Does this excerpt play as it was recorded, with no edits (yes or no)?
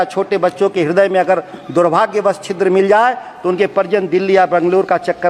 yes